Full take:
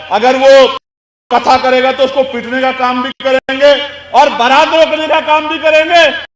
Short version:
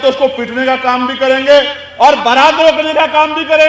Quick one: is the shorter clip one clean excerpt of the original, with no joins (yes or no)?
no